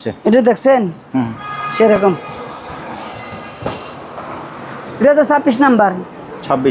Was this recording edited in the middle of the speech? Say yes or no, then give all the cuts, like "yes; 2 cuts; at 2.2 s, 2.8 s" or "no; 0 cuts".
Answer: no; 0 cuts